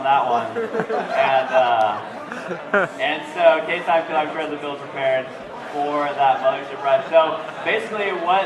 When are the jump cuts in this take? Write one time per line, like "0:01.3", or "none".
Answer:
none